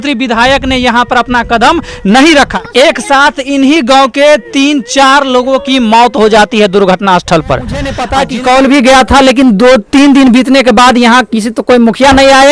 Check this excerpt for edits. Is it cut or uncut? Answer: cut